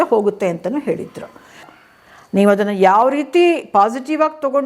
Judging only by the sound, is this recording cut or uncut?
cut